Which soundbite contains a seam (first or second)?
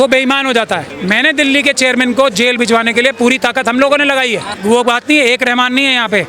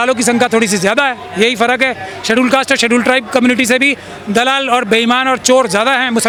first